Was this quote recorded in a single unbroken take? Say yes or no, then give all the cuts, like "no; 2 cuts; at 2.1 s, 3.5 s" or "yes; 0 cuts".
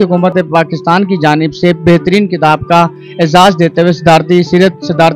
yes; 0 cuts